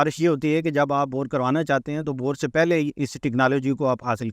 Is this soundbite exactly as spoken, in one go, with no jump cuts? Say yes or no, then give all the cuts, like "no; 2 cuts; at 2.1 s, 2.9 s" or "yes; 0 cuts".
yes; 0 cuts